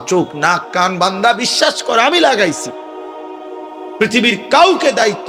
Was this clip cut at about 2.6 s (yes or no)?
no